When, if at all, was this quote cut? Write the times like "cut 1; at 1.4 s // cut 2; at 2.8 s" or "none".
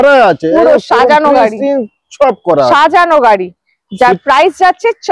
none

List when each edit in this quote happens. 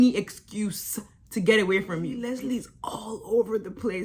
cut 1; at 2.2 s

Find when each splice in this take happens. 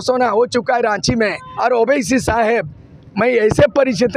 cut 1; at 1.4 s

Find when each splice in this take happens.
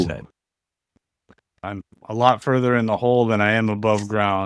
cut 1; at 1.6 s

